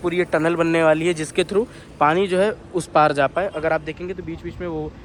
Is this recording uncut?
yes; 0 cuts

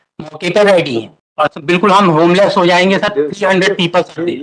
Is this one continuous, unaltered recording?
no; 1 cut; at 1.2 s

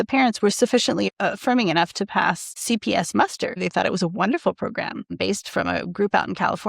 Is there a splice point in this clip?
yes; 4 cuts; at 1.1 s, 2.6 s, 3.6 s, 5.1 s

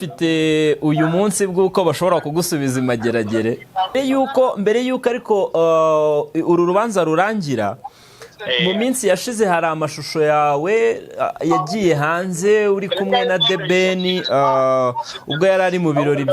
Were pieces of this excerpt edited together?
yes; 1 cut; at 3.9 s

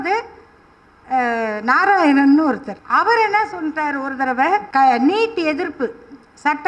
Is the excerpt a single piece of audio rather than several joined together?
no; 2 cuts; at 2.7 s, 4.7 s

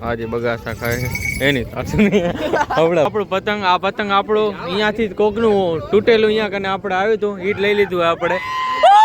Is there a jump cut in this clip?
yes; 1 cut; at 3.1 s

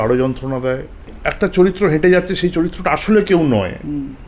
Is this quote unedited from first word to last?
no; 1 cut; at 1.2 s

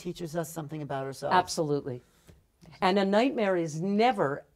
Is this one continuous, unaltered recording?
yes; 0 cuts

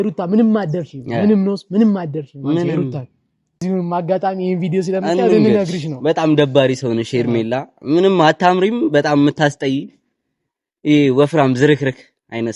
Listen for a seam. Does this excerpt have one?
yes; 1 cut; at 3.6 s

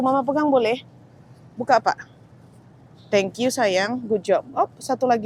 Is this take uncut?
yes; 0 cuts

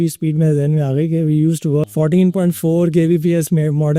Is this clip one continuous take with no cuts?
no; 1 cut; at 1.9 s

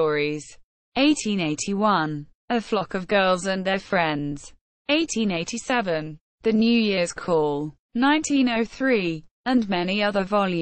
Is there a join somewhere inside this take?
yes; 1 cut; at 9.3 s

